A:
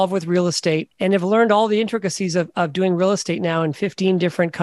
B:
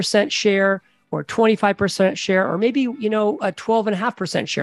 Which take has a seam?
A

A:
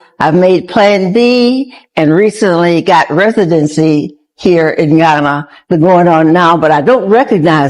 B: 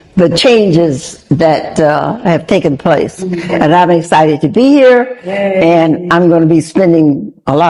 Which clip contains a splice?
A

